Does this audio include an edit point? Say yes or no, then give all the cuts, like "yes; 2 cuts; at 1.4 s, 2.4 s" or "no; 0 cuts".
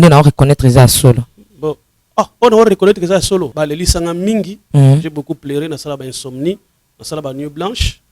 yes; 1 cut; at 3.6 s